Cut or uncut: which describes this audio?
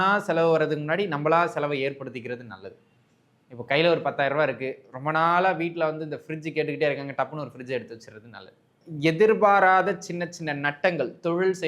cut